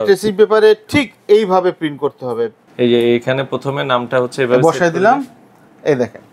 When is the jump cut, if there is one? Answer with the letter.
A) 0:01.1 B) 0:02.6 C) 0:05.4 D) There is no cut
B